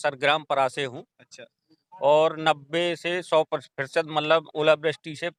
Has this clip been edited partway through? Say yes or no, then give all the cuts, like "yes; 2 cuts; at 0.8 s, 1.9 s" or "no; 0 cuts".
no; 0 cuts